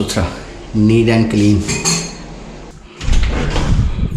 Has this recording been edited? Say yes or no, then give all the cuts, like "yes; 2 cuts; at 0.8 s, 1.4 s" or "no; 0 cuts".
no; 0 cuts